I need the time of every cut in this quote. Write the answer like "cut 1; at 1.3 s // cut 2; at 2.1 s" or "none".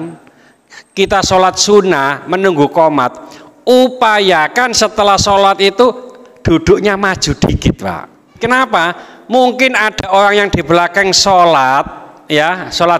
cut 1; at 8.4 s